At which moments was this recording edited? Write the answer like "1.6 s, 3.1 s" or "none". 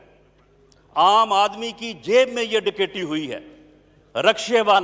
none